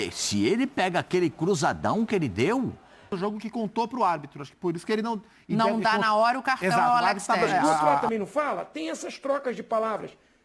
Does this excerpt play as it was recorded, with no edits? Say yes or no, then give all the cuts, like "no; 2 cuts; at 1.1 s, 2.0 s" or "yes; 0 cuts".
no; 2 cuts; at 3.1 s, 8.0 s